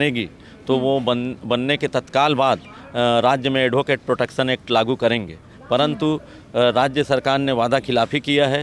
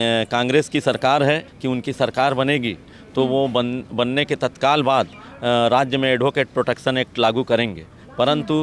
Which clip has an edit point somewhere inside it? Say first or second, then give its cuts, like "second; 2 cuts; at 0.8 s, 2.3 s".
second; 1 cut; at 1.5 s